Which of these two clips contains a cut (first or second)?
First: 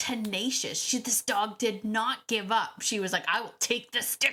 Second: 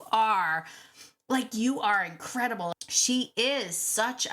second